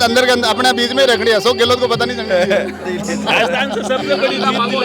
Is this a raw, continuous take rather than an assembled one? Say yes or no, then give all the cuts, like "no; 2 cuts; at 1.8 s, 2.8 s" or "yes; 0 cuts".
yes; 0 cuts